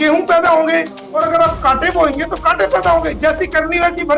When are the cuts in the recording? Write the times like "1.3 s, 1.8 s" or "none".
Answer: 1.0 s